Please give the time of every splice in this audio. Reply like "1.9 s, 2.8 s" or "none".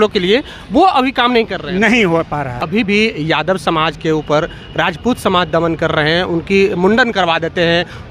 2.6 s